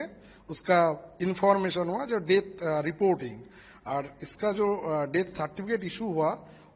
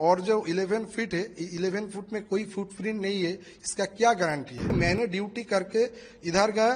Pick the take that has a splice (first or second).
second